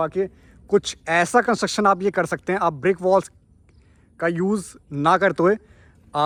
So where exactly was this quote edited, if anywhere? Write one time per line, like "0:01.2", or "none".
none